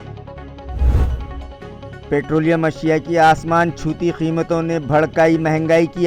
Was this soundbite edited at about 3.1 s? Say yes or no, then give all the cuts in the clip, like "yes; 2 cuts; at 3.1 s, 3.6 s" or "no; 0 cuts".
no; 1 cut; at 1.5 s